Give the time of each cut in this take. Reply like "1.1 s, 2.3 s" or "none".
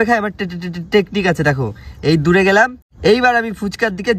2.8 s

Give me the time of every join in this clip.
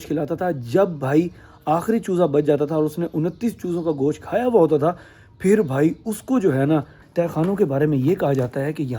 7.0 s

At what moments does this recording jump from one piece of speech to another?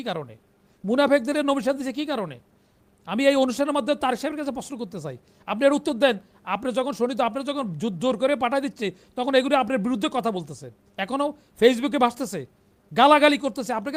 none

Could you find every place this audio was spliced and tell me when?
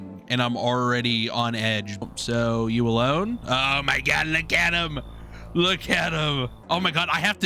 2.0 s, 6.6 s

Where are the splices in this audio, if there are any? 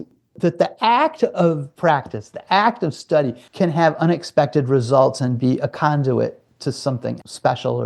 1.7 s, 3.4 s

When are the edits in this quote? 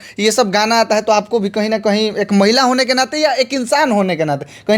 none

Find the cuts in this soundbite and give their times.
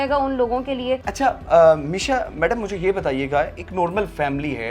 none

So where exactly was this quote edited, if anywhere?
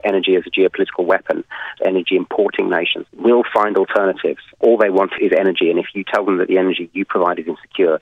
1.7 s

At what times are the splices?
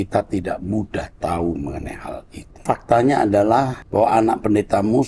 2.6 s, 3.8 s

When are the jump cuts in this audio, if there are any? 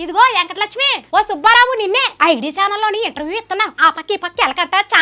0.9 s, 2.1 s

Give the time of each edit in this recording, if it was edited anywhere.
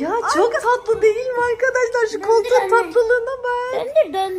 none

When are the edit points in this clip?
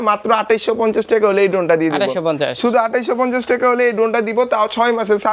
none

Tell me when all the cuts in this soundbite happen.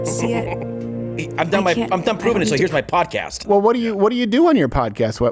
3.4 s

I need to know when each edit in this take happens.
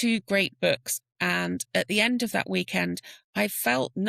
1.0 s

